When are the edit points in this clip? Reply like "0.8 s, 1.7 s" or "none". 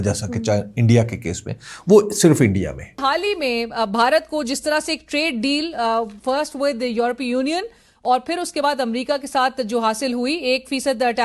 3.3 s